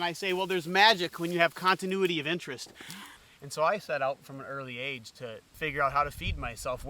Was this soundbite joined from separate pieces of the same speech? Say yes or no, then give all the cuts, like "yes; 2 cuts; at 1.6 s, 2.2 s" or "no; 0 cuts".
yes; 2 cuts; at 3.0 s, 5.5 s